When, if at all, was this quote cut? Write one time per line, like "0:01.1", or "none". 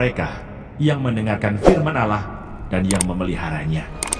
none